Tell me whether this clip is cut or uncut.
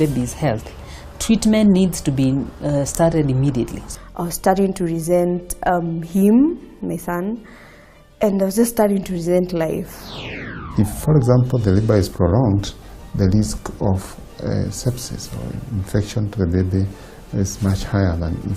cut